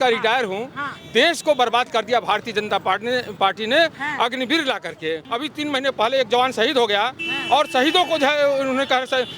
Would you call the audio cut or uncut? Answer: cut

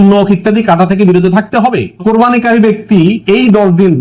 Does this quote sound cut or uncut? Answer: cut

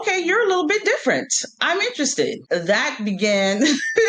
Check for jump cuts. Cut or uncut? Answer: cut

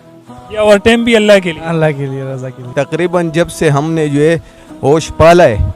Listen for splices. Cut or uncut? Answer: cut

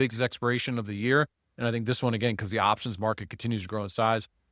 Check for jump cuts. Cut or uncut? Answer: uncut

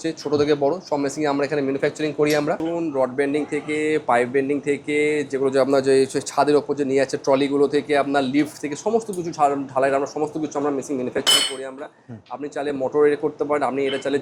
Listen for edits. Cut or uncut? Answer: cut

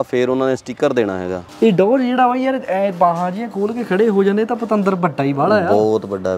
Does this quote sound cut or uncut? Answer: cut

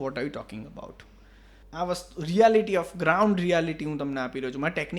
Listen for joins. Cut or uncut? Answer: cut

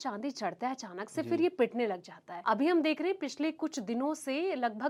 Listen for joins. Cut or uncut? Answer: uncut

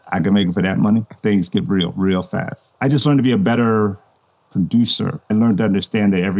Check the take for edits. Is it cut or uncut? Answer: cut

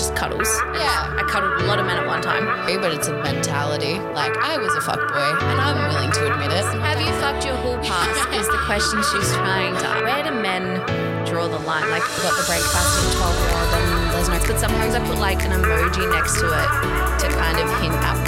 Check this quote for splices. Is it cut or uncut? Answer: uncut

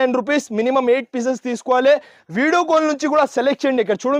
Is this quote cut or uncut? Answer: uncut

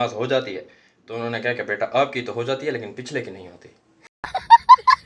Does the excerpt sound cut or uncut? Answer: cut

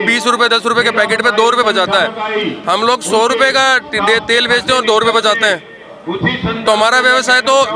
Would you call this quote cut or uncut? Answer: uncut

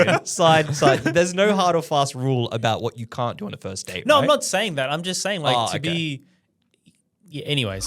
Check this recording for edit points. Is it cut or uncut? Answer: uncut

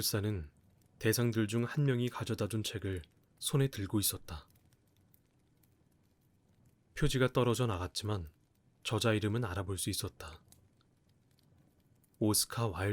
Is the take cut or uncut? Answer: cut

